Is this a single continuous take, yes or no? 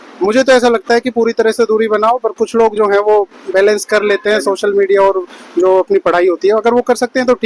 yes